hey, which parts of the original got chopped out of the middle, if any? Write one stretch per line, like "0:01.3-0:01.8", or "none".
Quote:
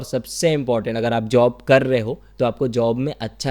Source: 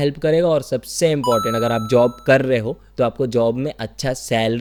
none